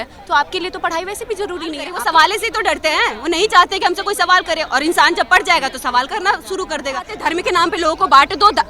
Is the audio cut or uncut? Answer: cut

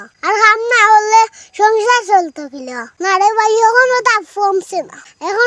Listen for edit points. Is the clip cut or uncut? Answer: cut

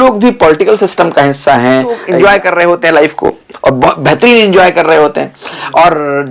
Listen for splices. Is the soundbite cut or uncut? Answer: cut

